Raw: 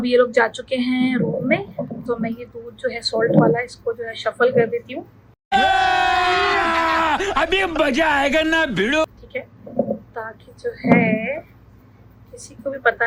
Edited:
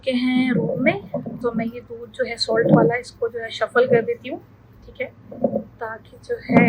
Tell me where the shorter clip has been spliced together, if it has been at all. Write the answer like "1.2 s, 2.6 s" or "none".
4.8 s